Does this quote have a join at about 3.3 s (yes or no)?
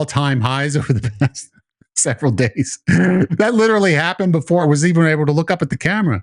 yes